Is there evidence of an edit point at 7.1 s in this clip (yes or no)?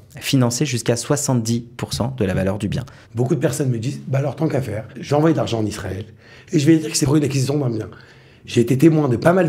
yes